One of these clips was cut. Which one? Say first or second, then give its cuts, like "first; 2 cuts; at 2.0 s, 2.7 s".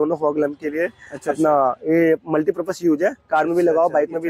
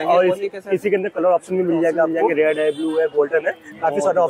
second; 1 cut; at 2.2 s